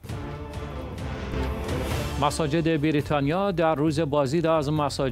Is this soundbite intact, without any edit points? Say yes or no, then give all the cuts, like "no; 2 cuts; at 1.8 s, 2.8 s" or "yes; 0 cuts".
no; 1 cut; at 1.3 s